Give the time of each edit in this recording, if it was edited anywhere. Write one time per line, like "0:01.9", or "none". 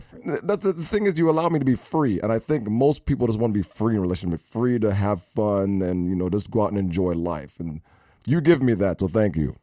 none